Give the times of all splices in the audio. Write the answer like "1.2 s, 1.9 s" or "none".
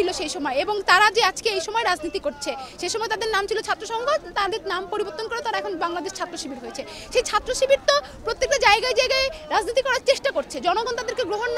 none